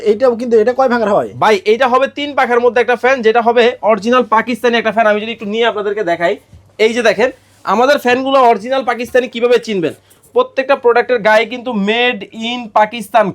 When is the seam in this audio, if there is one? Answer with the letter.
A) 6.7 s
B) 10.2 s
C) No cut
C